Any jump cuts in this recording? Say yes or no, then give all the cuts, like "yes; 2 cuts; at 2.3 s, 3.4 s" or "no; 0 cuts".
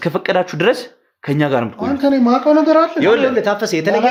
no; 0 cuts